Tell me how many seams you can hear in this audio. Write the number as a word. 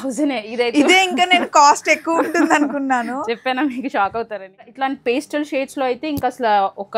one